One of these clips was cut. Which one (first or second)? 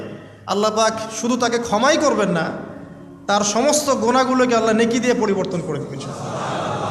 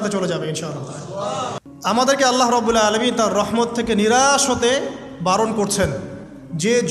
second